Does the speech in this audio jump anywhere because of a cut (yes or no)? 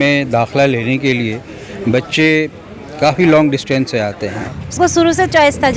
yes